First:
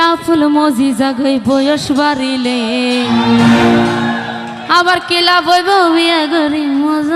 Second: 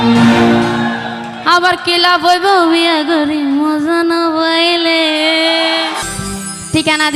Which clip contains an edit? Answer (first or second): second